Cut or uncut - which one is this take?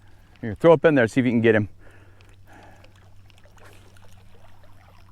uncut